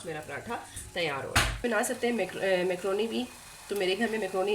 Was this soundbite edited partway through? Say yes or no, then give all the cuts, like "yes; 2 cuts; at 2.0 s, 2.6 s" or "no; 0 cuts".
yes; 1 cut; at 1.6 s